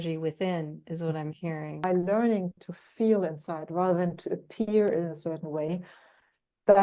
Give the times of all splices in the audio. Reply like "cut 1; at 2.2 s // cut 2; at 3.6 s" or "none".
cut 1; at 1.8 s